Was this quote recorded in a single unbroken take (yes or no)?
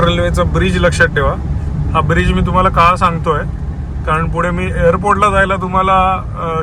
yes